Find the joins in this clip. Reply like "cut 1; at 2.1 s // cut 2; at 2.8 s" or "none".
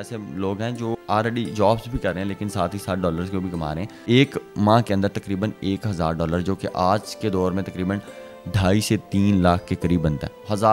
cut 1; at 1.0 s // cut 2; at 3.9 s